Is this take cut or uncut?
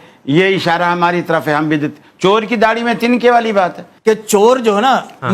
cut